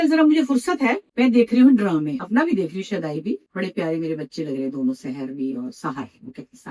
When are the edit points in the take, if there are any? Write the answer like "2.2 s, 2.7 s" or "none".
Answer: 1.0 s, 2.2 s, 3.5 s